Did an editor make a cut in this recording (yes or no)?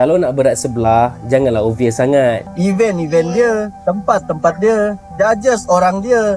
yes